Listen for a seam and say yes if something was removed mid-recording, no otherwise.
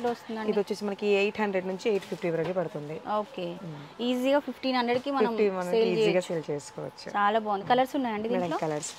no